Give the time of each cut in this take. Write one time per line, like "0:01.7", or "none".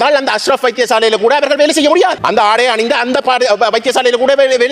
0:02.2